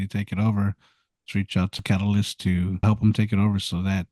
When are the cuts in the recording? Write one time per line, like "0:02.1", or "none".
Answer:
0:01.8
0:02.8